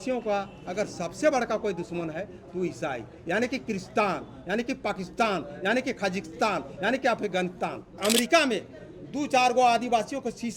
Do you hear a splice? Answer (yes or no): yes